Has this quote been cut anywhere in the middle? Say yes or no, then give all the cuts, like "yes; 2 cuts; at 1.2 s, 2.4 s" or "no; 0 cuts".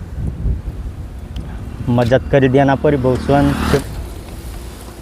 yes; 1 cut; at 3.8 s